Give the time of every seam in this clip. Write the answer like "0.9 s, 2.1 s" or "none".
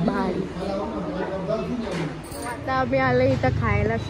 2.7 s